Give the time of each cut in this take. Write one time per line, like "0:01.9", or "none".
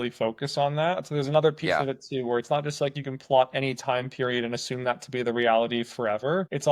none